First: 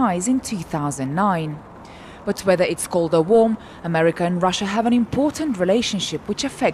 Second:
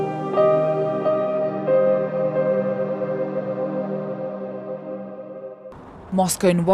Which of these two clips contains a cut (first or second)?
second